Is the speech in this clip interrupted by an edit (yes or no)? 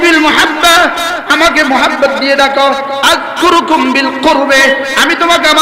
no